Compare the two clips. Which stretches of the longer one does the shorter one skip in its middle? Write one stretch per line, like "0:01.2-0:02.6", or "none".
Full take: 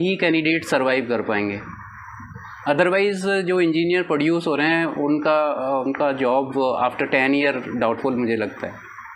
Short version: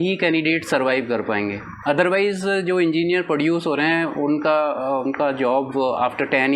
0:01.7-0:02.5